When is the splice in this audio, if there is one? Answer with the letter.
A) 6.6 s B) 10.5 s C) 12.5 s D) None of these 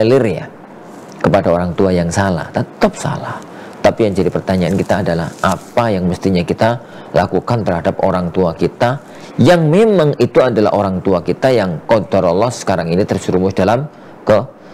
D